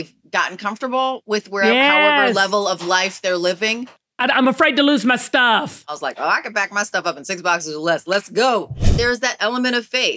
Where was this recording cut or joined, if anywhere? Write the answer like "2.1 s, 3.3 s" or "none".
4.2 s, 5.9 s, 8.9 s